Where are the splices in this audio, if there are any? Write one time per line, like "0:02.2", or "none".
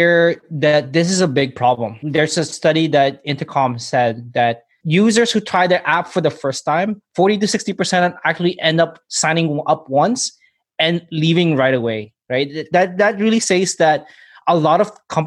0:02.0
0:04.7

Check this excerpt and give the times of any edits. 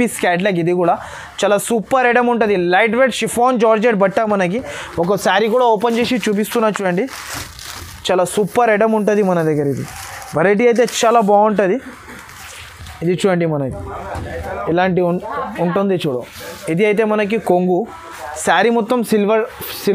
none

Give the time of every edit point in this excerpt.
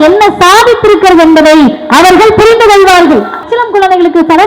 0:03.5

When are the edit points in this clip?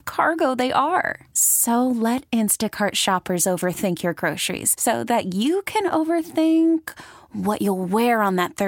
none

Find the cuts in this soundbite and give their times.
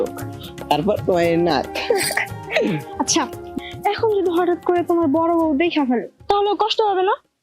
0:03.5

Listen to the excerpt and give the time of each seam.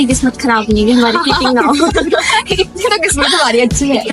none

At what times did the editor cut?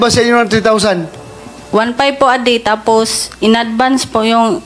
0:01.5

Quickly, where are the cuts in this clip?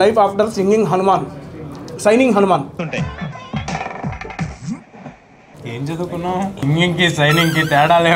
0:02.8
0:05.5
0:06.6

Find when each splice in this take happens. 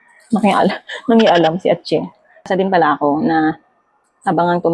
0:02.5

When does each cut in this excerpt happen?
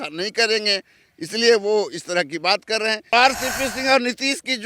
0:03.1

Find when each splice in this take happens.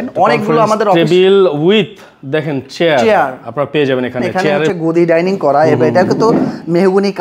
0:04.7

